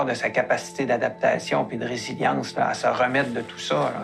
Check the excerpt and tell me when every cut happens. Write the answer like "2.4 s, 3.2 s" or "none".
none